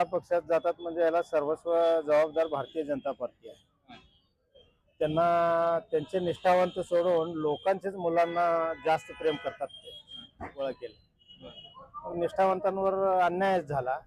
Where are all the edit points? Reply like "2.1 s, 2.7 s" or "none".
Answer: 10.6 s